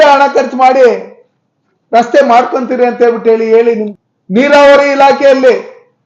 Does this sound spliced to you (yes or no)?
yes